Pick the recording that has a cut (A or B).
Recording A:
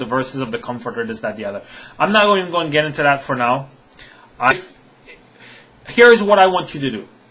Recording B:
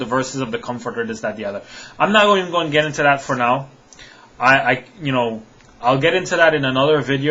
B